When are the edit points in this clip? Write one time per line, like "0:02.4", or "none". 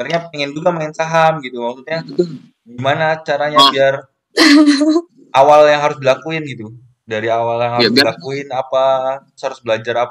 none

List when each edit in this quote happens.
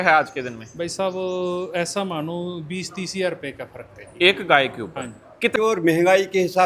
0:05.5

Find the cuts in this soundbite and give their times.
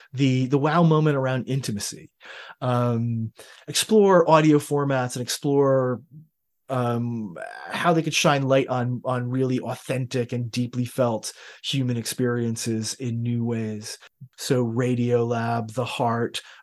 0:02.4
0:14.1

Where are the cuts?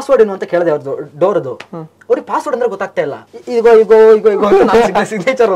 none

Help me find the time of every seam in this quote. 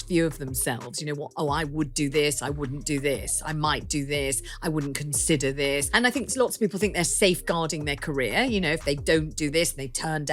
0:05.9

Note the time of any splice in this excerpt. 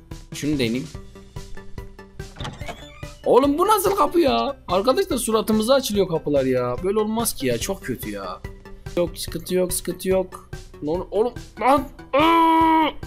0:09.0

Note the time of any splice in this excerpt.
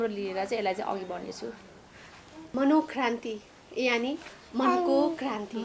0:02.5

